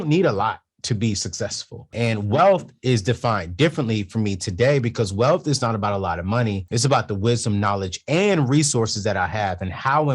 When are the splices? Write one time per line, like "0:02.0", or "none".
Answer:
0:01.9
0:06.6